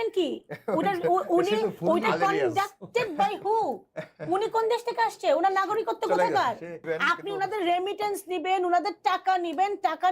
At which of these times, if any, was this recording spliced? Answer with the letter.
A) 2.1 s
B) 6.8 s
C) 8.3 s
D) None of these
B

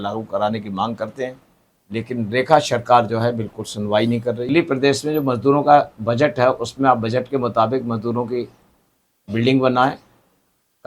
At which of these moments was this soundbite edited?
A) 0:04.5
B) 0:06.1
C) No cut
A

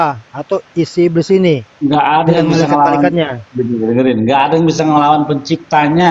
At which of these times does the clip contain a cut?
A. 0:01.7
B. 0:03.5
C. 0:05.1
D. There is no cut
A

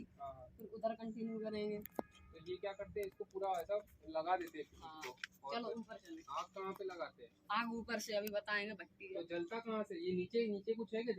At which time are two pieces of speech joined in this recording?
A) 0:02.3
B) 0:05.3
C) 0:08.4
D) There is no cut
D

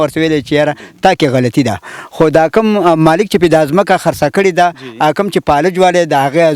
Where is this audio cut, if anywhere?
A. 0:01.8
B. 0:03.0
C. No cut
C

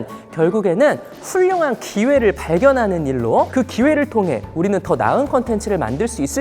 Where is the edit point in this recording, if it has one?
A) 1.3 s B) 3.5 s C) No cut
B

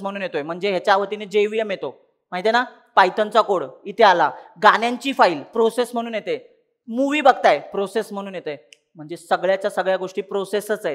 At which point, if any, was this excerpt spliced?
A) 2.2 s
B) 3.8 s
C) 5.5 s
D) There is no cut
D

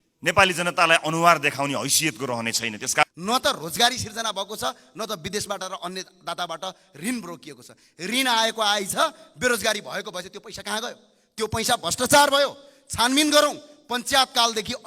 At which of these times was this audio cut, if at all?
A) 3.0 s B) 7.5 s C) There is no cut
A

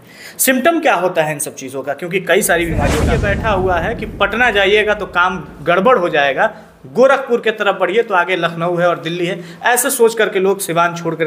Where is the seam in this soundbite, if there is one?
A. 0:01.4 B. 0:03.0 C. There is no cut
B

